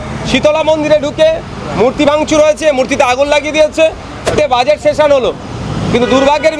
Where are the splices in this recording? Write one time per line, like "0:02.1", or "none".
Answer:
0:04.3